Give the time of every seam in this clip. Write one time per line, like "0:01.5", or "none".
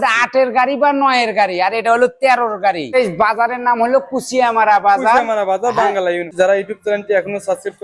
0:02.9
0:06.3